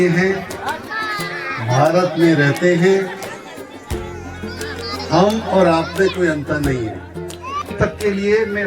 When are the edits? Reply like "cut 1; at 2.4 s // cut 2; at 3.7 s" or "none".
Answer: cut 1; at 7.6 s